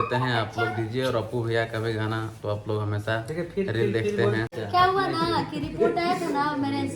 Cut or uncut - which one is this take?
cut